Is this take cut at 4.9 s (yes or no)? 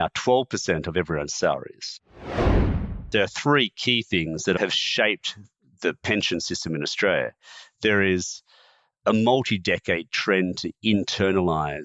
no